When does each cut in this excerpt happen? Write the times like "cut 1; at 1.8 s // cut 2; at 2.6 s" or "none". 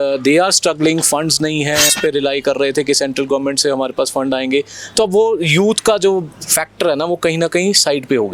cut 1; at 1.9 s